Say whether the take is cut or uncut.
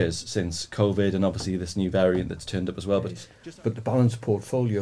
cut